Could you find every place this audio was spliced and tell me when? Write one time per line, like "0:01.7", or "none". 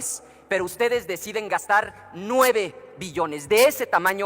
none

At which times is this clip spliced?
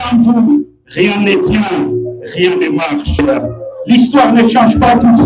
0:03.2

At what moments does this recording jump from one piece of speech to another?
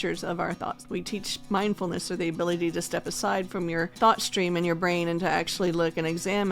0:00.9
0:03.9

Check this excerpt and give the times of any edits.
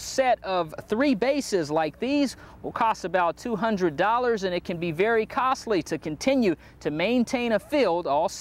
none

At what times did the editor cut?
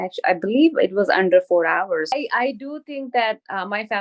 0:02.2

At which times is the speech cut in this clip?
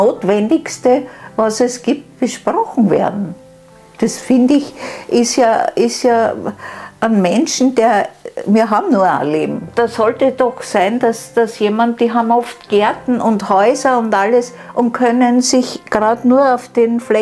0:09.7

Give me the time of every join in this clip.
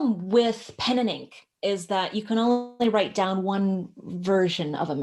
none

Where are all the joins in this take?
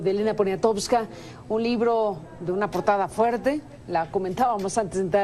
0:03.1

